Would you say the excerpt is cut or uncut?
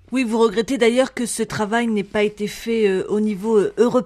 uncut